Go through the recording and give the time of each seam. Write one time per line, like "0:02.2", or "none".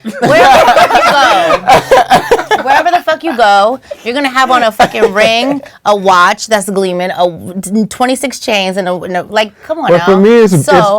none